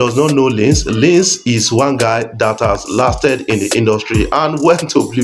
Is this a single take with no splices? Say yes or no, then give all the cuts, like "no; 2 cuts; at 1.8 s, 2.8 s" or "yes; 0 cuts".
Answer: yes; 0 cuts